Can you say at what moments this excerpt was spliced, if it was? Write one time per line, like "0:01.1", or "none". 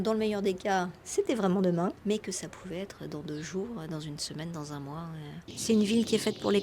0:02.0
0:05.5